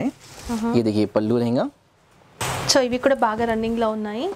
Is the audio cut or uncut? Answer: cut